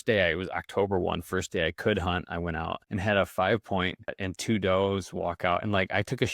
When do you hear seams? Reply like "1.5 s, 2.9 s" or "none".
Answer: 2.8 s, 4.3 s